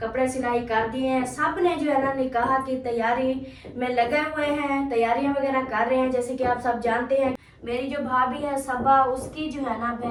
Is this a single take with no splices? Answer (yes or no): yes